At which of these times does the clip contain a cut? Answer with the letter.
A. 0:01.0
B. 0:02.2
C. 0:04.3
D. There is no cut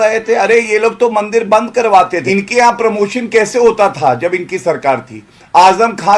B